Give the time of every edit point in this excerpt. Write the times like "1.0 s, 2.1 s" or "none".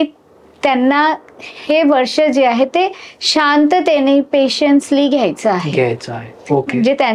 none